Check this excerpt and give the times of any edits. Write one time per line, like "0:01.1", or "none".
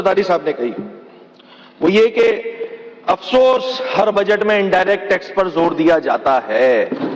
none

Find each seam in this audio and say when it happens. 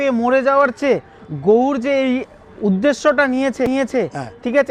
none

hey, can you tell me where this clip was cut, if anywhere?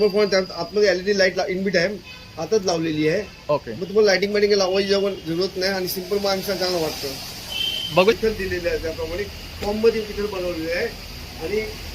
0:08.1

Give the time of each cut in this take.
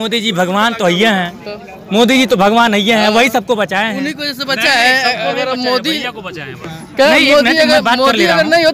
none

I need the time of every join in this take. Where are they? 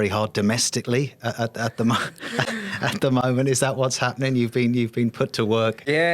none

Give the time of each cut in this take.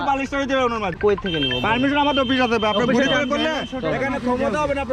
0:01.0

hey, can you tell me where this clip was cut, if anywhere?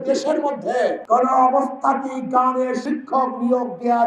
0:01.0
0:02.8

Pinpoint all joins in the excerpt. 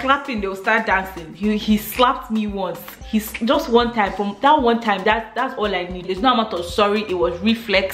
none

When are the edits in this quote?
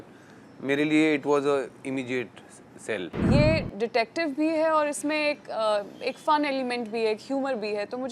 0:03.1

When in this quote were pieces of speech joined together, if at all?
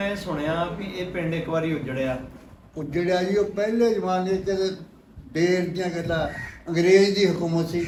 none

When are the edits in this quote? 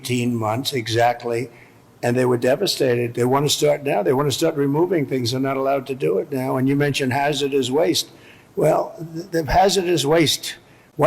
none

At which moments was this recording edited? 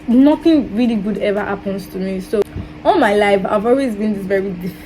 0:02.4

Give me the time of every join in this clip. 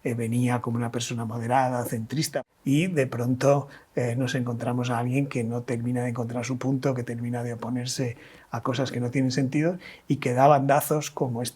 0:02.3

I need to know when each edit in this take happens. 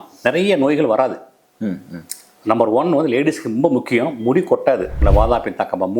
0:05.0

